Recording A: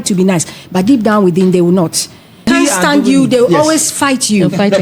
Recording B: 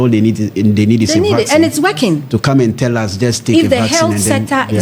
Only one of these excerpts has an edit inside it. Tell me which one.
A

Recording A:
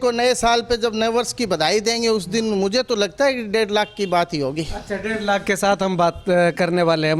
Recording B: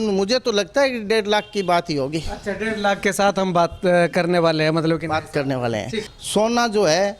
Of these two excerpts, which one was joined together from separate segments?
B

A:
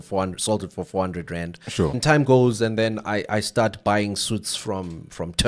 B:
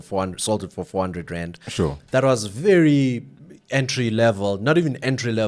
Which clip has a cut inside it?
A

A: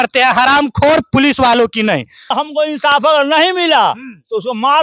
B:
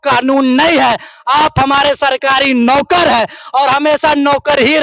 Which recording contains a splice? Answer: A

